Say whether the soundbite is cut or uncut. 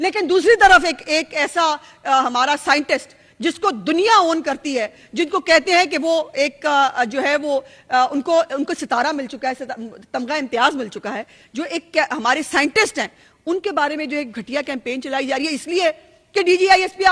uncut